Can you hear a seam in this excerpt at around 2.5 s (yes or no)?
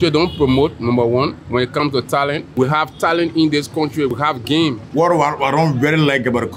yes